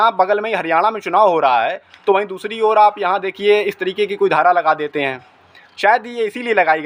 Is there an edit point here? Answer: no; 0 cuts

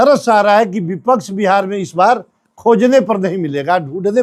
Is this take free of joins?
yes; 0 cuts

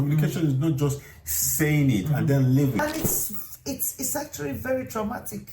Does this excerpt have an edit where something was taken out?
yes; 1 cut; at 2.8 s

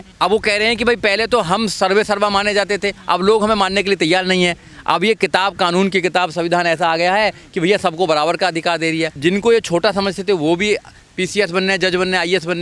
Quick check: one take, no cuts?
yes; 0 cuts

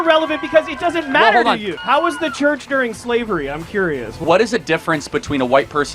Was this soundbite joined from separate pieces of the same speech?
yes; 2 cuts; at 1.7 s, 4.2 s

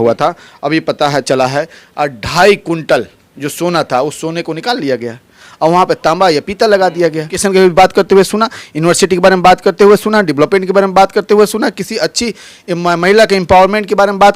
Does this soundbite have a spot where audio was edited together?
yes; 1 cut; at 7.3 s

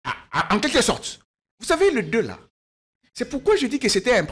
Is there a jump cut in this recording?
no; 0 cuts

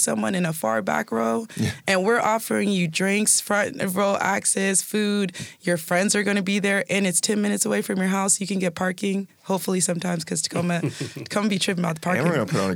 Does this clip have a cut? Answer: no; 0 cuts

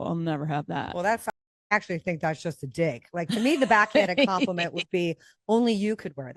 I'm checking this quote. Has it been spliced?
no; 0 cuts

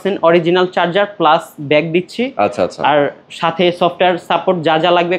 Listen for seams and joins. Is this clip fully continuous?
yes; 0 cuts

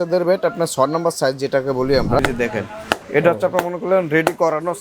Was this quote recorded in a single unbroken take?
no; 1 cut; at 2.2 s

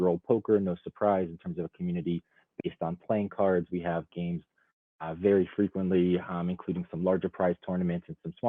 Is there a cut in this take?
no; 0 cuts

